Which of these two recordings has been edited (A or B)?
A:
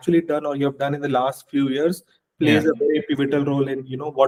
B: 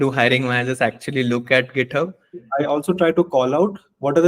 B